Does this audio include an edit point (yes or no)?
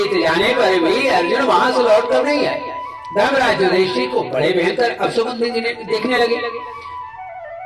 no